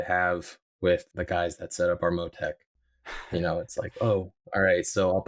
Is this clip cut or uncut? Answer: uncut